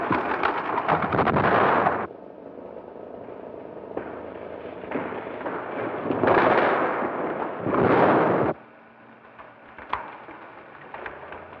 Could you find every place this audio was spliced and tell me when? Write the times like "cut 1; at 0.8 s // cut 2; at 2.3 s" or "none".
cut 1; at 1.7 s